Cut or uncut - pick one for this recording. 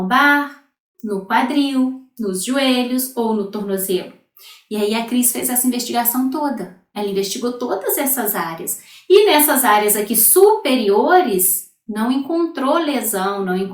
uncut